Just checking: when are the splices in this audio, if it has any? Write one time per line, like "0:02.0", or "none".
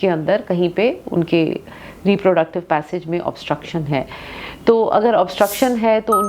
none